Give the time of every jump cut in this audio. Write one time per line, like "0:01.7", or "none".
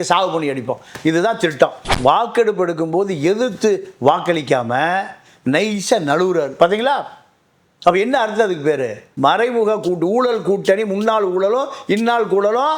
0:01.9